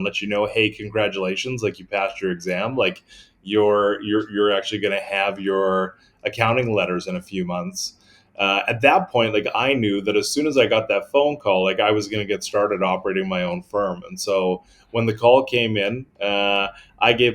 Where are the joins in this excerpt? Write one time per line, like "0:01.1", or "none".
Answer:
none